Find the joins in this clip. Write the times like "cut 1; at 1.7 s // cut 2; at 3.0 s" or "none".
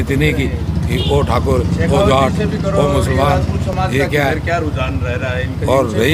none